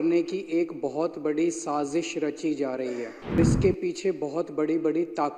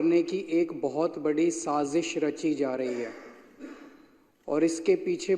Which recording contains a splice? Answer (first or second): first